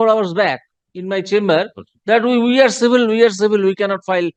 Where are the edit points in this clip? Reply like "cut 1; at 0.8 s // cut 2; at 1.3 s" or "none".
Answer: none